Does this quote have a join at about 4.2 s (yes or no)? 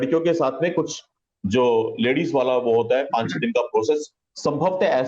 yes